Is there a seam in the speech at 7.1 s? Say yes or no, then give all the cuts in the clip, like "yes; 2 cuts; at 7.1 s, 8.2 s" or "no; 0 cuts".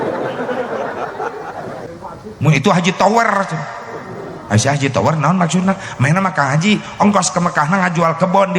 no; 1 cut; at 1.9 s